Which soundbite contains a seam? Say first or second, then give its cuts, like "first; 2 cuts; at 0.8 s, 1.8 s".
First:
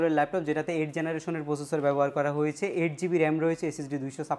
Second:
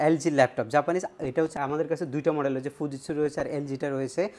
second; 1 cut; at 1.5 s